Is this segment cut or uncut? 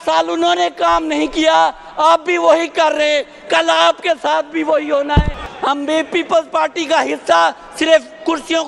cut